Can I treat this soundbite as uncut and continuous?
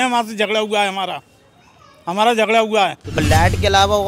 no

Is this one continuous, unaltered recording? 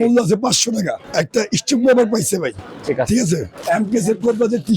no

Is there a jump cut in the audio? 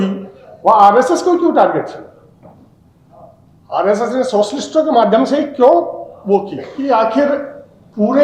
yes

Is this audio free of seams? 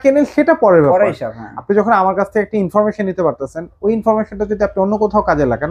yes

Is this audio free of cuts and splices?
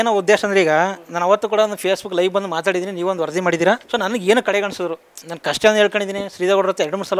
yes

